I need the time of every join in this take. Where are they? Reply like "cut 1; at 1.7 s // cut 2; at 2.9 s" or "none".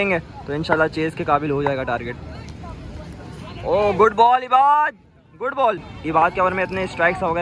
cut 1; at 5.9 s